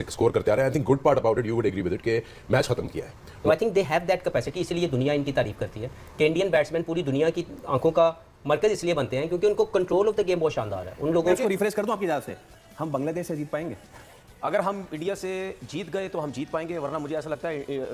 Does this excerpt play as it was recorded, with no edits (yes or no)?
no